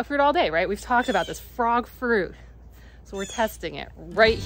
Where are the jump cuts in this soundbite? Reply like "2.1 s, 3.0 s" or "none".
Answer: none